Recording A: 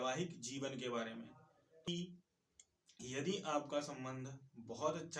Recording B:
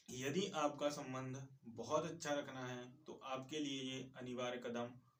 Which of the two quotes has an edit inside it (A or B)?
A